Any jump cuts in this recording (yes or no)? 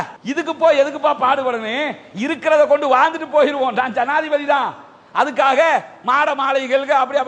no